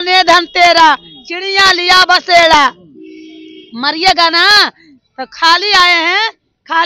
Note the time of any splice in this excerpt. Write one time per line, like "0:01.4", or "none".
none